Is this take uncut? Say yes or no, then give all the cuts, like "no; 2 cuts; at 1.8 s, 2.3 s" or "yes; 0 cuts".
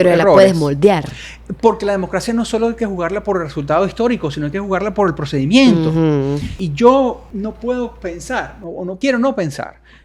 no; 3 cuts; at 6.6 s, 7.2 s, 9.0 s